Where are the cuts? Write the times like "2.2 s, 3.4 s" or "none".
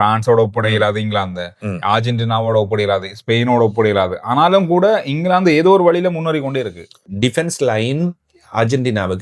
7.1 s